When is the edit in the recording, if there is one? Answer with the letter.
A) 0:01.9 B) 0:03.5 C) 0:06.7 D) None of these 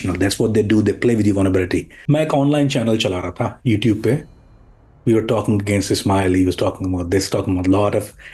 A